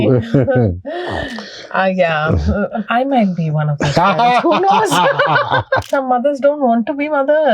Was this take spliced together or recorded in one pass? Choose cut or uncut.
cut